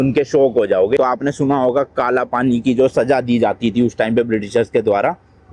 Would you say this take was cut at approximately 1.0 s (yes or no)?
yes